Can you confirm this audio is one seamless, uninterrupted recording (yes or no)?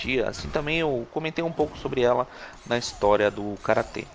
no